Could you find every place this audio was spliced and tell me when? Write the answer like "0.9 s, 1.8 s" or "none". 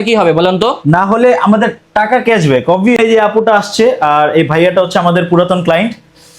3.0 s